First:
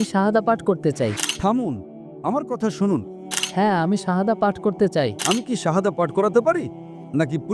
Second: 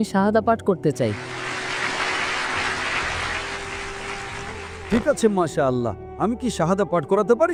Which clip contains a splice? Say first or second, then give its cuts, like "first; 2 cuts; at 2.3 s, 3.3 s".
first; 3 cuts; at 1.3 s, 3.2 s, 5.2 s